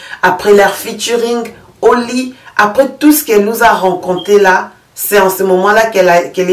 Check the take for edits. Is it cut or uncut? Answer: uncut